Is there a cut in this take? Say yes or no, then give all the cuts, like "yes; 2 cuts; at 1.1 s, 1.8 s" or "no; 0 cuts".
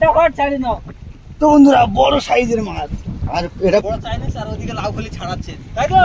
yes; 1 cut; at 3.8 s